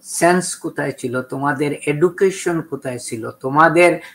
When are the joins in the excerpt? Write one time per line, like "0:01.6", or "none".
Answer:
none